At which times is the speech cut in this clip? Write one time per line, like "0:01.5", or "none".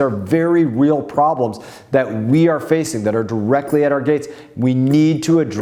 none